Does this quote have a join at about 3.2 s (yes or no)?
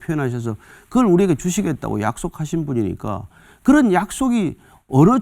no